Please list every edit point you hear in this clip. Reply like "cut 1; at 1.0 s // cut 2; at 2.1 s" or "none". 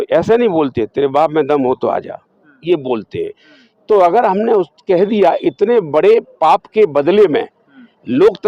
none